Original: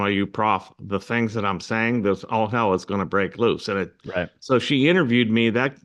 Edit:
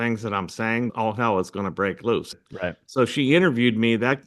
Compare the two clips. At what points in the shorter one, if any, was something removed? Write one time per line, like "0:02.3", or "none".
0:00.9
0:02.3